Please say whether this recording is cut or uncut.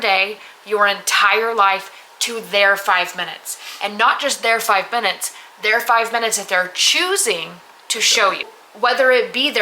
cut